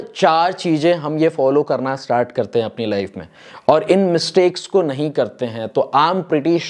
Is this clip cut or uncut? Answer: uncut